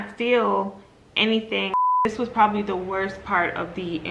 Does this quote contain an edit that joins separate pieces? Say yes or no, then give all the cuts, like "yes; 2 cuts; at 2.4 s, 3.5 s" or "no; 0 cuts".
yes; 1 cut; at 2.0 s